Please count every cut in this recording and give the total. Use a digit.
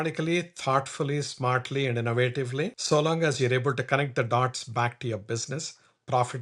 1